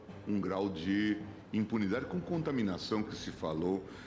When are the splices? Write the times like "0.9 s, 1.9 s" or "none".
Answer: none